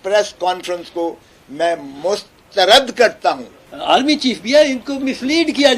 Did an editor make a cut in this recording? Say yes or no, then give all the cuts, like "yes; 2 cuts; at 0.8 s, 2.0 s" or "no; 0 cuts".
yes; 1 cut; at 3.2 s